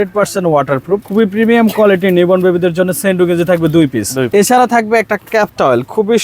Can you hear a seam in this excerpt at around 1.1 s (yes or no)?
yes